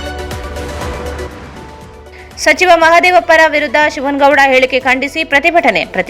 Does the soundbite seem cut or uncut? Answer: uncut